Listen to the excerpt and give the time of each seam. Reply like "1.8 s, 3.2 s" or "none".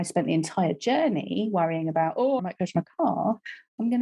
2.4 s